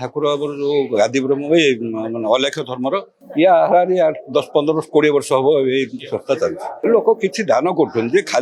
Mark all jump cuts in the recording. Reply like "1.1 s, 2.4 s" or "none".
3.3 s

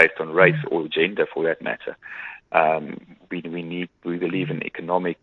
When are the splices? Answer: none

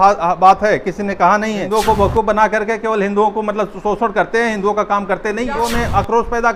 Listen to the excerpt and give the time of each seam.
1.7 s, 5.5 s

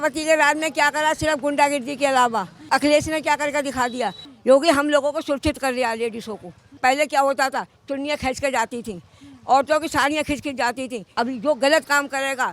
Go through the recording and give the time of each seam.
2.7 s, 4.3 s, 6.7 s, 11.0 s

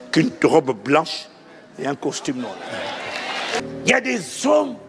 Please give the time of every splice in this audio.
3.6 s

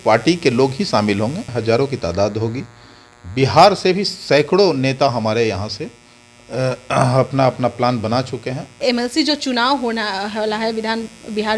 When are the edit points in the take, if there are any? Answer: 1.5 s, 8.8 s

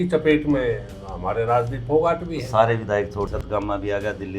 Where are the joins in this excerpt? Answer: 3.3 s

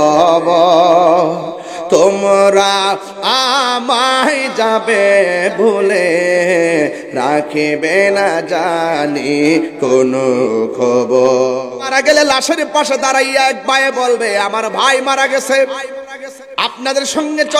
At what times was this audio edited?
11.7 s

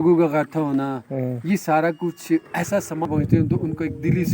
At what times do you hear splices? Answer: 3.1 s

